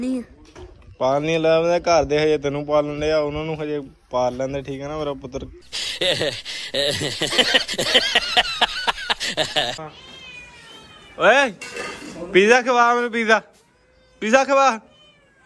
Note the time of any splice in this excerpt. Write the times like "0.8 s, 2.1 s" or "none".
9.8 s

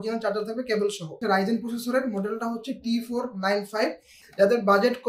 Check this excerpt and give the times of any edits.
1.2 s, 4.1 s

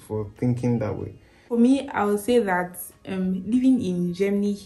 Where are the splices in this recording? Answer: 1.4 s

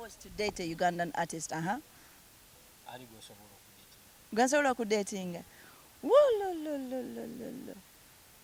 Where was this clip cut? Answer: none

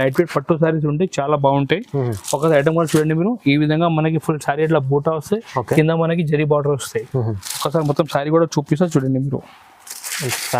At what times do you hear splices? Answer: none

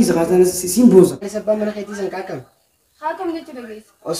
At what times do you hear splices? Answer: 1.3 s

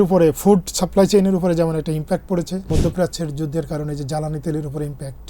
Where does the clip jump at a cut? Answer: 2.7 s

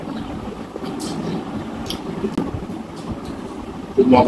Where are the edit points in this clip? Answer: 2.4 s

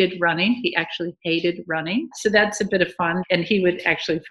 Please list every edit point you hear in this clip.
2.1 s, 3.2 s

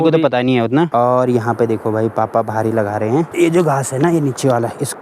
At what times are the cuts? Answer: 0.9 s, 3.3 s

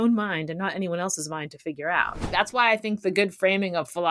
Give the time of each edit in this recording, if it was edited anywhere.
2.3 s

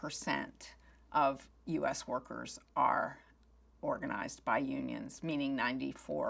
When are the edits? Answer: none

